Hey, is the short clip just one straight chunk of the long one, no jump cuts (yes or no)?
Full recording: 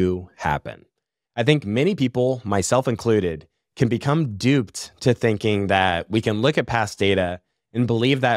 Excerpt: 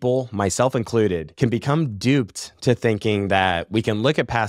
no